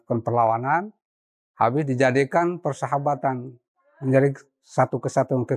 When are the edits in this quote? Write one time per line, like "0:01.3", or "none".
none